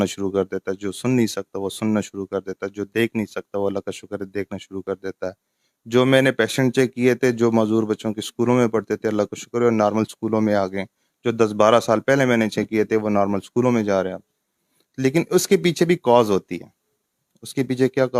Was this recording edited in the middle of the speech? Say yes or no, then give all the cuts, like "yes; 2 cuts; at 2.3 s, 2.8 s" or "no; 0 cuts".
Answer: no; 0 cuts